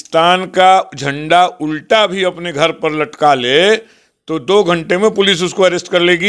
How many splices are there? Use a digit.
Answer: 0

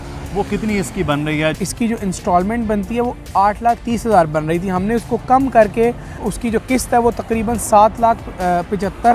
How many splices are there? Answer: 2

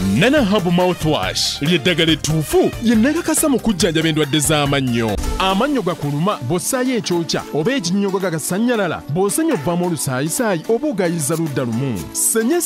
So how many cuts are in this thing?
0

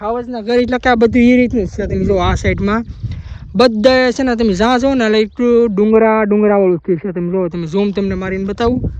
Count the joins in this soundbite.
0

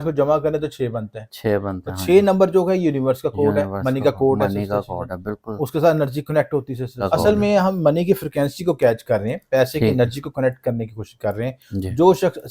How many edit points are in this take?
1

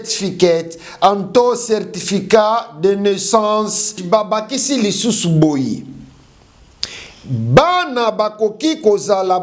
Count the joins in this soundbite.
1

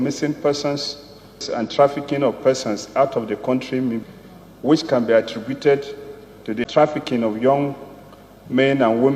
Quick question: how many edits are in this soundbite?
3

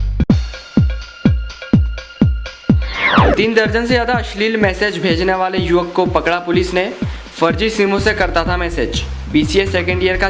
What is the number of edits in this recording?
1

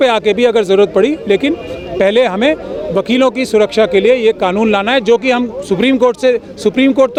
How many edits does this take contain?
0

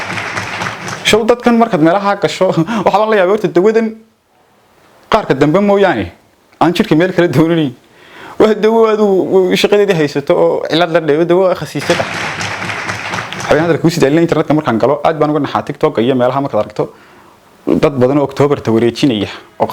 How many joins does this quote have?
2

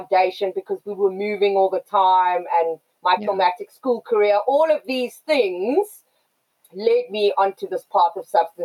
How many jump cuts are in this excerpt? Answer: 1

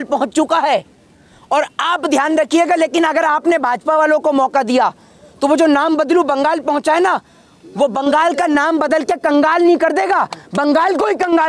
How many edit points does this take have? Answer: 0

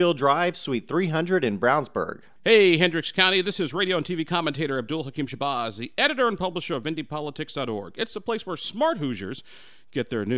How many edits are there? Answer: 1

